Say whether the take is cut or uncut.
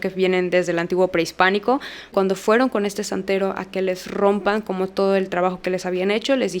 cut